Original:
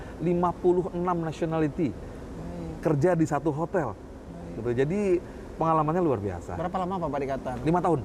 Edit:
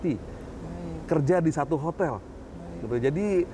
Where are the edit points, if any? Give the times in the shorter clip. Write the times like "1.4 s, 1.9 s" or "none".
none